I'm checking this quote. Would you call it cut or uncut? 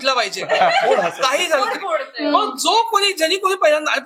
uncut